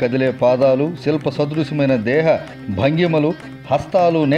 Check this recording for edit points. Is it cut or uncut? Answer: uncut